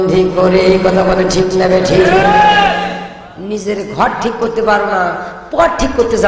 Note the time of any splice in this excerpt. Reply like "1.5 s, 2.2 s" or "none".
3.0 s